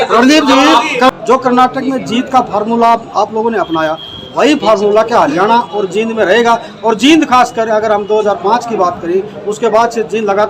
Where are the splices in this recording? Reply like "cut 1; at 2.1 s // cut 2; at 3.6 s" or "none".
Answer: cut 1; at 1.1 s